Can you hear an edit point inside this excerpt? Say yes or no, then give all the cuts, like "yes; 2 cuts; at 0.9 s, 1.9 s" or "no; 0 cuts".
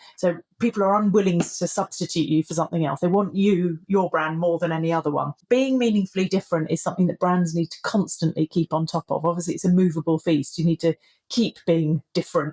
yes; 1 cut; at 5.4 s